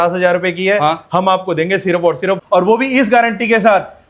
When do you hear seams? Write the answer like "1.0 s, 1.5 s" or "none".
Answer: 2.4 s